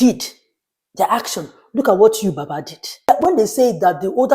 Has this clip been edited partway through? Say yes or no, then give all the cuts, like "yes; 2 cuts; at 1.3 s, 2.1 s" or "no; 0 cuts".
yes; 1 cut; at 3.1 s